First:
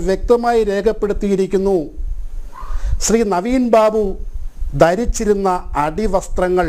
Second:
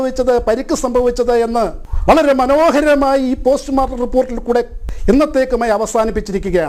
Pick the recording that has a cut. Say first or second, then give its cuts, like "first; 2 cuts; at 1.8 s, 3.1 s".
second; 2 cuts; at 1.9 s, 4.8 s